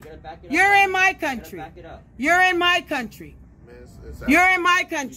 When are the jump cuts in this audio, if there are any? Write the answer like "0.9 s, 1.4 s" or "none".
none